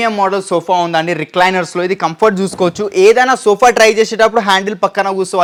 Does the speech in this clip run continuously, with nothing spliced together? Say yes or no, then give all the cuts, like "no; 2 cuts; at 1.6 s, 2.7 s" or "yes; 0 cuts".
yes; 0 cuts